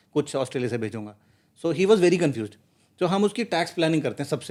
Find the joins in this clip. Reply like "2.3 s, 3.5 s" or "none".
none

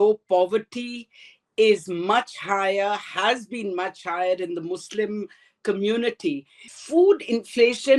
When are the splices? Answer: 6.8 s

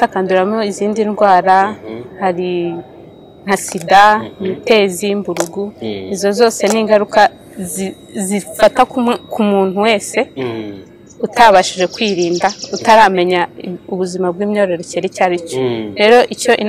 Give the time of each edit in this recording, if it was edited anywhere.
none

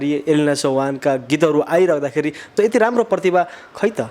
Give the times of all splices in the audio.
2.4 s

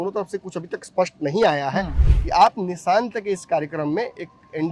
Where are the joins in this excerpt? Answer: 2.0 s

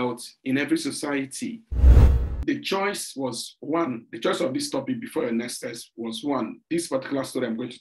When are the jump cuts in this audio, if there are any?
2.0 s

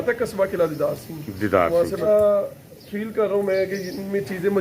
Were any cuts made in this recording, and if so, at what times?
2.1 s

